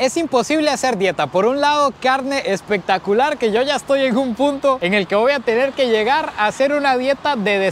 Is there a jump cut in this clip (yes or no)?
no